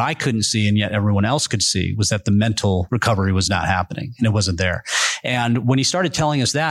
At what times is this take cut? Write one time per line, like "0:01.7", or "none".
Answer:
0:02.9